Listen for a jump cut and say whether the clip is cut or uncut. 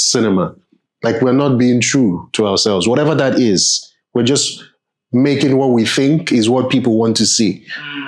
uncut